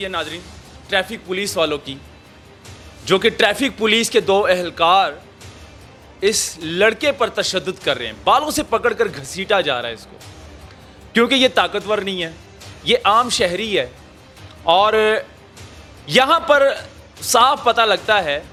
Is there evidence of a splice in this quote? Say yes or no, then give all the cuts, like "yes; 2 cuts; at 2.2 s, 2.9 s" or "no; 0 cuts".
no; 0 cuts